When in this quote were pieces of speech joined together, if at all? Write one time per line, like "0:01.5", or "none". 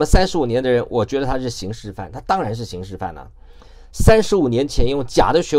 none